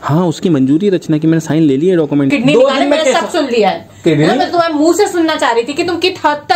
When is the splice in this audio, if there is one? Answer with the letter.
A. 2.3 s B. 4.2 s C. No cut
A